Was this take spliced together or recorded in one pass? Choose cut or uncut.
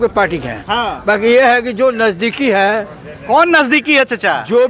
uncut